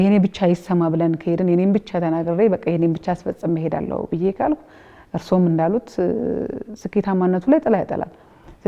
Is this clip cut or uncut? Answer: uncut